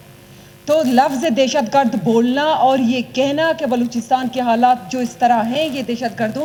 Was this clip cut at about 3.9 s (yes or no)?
no